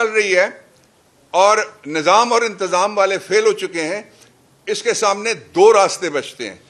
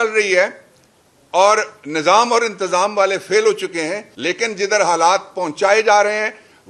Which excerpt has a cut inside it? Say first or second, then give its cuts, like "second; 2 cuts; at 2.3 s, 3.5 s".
second; 1 cut; at 4.1 s